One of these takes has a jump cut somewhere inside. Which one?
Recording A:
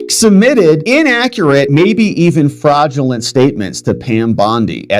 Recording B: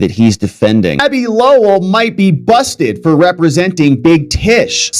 B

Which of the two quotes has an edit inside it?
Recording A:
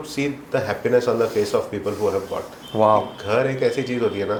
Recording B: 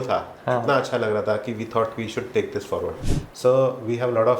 B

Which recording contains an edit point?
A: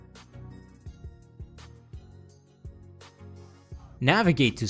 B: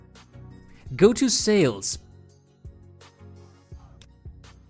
B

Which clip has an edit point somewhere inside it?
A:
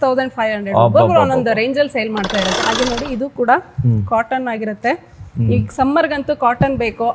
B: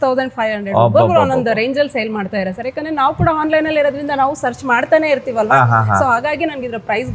A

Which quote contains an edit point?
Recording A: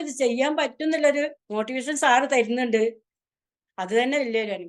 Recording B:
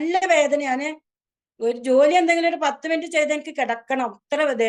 A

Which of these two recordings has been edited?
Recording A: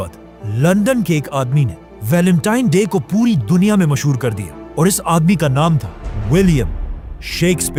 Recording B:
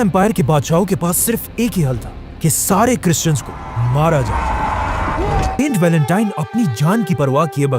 B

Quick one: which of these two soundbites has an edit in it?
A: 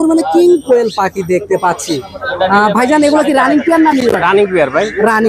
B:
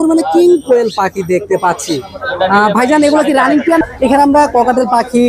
B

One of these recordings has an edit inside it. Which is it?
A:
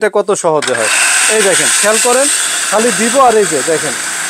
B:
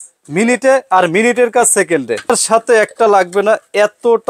B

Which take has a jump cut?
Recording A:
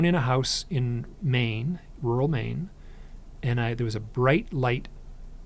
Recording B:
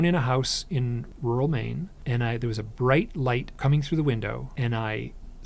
B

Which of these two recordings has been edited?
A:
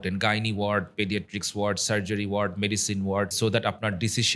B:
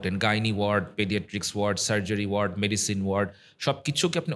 A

